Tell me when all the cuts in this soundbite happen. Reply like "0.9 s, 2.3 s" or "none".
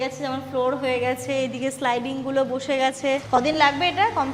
3.2 s